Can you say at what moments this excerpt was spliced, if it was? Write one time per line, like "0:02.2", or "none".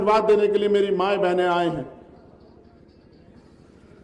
0:02.7